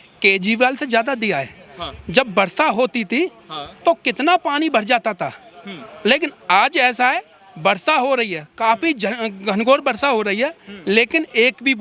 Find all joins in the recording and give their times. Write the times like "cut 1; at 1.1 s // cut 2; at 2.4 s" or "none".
none